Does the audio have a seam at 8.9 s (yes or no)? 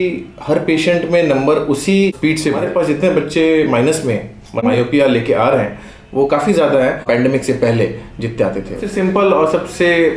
yes